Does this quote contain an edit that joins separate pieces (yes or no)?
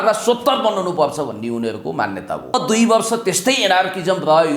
yes